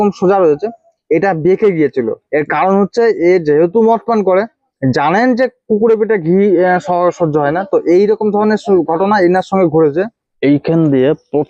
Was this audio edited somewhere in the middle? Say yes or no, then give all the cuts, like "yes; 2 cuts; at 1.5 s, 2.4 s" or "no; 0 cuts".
yes; 2 cuts; at 4.6 s, 10.2 s